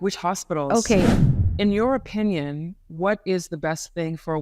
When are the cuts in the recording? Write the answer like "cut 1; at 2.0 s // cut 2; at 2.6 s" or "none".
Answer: cut 1; at 1.1 s